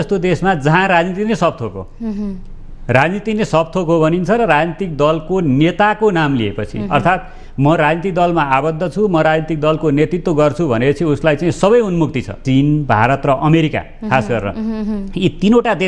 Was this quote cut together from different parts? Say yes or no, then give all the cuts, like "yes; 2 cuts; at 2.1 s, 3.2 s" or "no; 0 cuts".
yes; 1 cut; at 12.4 s